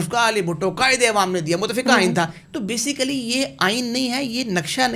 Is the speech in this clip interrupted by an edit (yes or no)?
yes